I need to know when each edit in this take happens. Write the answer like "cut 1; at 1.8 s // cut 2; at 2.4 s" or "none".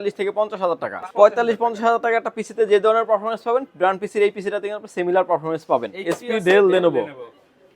cut 1; at 1.0 s // cut 2; at 5.9 s